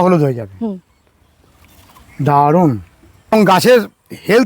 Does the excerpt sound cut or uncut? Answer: cut